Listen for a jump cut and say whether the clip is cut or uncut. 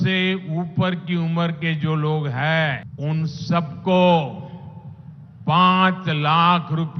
cut